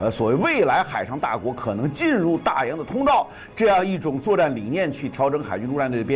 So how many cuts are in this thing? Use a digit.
0